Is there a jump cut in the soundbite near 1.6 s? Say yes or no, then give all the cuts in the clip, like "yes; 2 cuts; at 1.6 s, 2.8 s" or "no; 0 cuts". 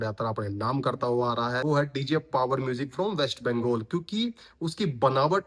yes; 1 cut; at 1.6 s